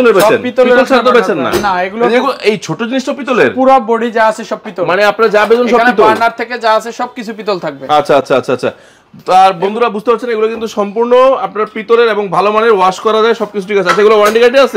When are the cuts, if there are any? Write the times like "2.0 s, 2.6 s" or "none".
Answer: none